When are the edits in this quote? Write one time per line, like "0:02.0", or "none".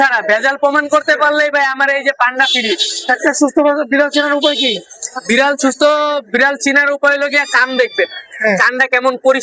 none